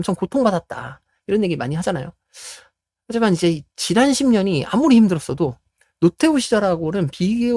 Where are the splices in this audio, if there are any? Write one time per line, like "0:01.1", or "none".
none